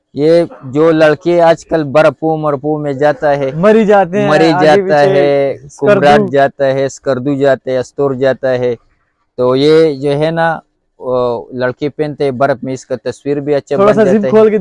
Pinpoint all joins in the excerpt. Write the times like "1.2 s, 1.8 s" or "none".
none